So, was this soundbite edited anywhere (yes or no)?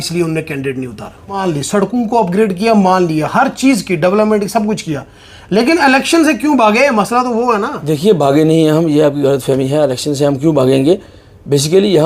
yes